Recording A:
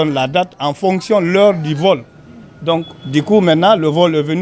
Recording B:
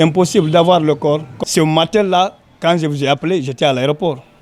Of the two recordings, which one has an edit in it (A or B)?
B